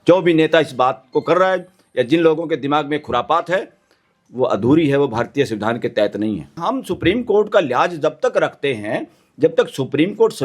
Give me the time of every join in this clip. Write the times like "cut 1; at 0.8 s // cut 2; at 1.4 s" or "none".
cut 1; at 6.5 s